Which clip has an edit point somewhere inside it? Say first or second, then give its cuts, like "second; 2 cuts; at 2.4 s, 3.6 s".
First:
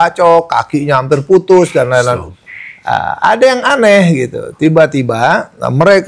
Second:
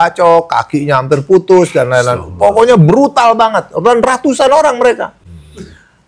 first; 1 cut; at 2.3 s